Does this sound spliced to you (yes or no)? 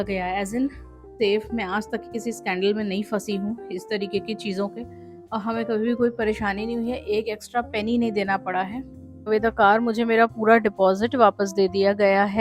yes